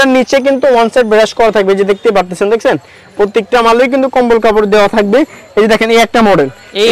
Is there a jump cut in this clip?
no; 0 cuts

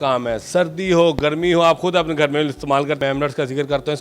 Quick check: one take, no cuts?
no; 1 cut; at 3.0 s

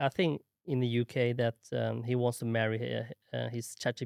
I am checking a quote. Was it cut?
no; 0 cuts

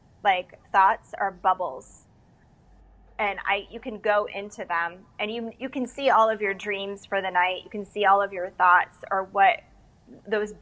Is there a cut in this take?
no; 0 cuts

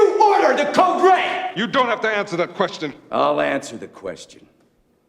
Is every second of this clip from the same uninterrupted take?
no; 1 cut; at 2.9 s

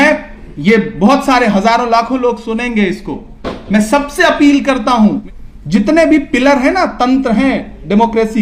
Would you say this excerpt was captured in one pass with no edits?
no; 1 cut; at 5.2 s

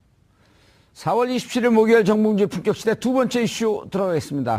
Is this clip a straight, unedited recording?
yes; 0 cuts

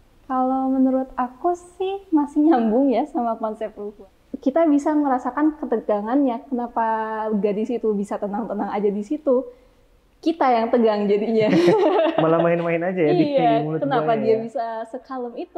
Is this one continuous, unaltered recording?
no; 1 cut; at 3.8 s

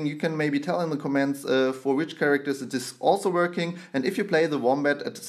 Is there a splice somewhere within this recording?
yes; 1 cut; at 1.1 s

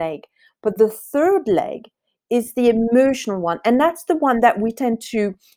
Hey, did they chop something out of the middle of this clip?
no; 0 cuts

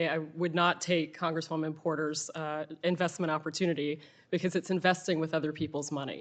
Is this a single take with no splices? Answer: yes; 0 cuts

